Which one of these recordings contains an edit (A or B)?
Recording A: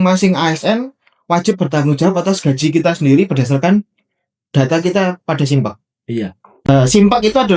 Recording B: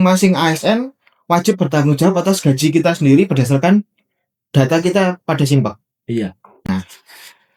A